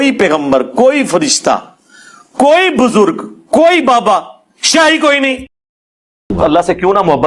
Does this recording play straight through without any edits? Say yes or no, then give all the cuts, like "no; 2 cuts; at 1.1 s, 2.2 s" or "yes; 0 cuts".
no; 1 cut; at 6.1 s